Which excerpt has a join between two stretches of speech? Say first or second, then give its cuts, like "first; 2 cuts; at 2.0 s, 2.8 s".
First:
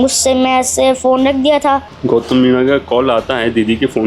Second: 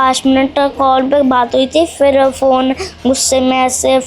first; 1 cut; at 1.9 s